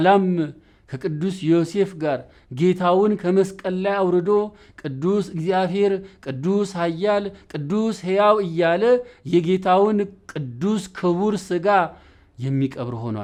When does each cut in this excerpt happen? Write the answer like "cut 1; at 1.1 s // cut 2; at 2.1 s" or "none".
none